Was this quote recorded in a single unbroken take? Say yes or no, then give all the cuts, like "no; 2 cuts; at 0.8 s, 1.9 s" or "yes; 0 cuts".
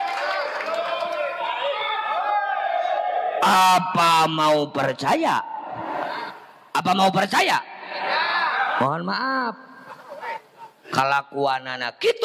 yes; 0 cuts